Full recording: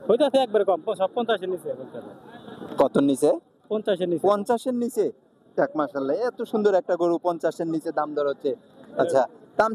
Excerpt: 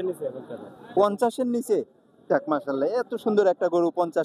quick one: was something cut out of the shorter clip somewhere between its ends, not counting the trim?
yes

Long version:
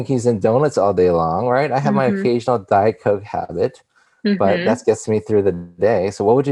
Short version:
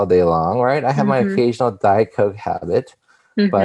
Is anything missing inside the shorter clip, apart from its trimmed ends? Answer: no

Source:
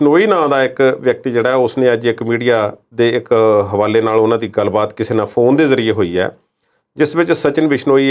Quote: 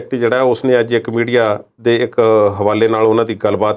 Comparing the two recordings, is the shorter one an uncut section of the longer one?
yes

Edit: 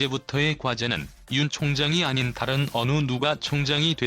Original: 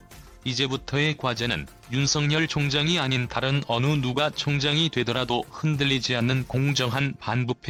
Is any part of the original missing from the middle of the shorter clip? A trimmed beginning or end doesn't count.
yes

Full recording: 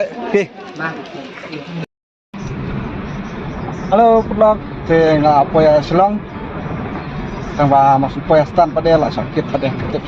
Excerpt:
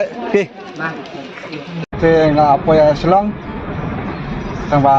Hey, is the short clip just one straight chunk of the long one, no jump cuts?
no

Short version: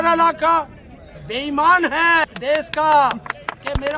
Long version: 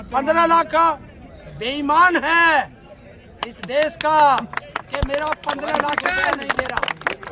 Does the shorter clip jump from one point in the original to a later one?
yes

